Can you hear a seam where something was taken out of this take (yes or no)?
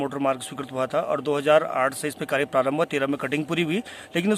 no